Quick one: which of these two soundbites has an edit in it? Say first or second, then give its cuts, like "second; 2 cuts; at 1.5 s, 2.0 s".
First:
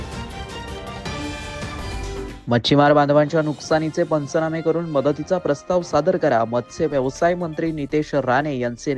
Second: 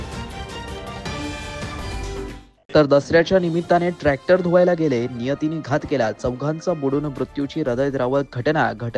first; 1 cut; at 2.3 s